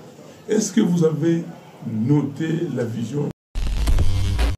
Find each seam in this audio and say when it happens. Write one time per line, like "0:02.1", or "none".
0:03.5

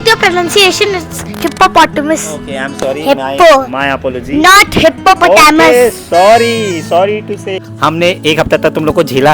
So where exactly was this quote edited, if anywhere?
0:06.8
0:07.7

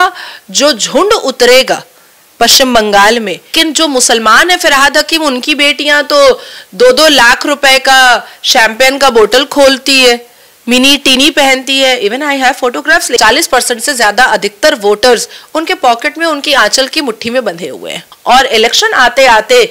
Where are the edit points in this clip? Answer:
0:03.5
0:13.2
0:18.0

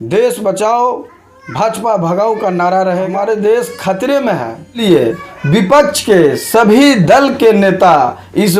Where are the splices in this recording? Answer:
0:03.1
0:04.8

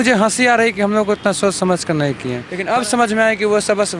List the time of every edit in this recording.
0:02.5

